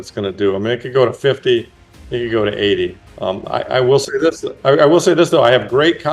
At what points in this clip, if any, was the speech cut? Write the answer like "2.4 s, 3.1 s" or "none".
3.0 s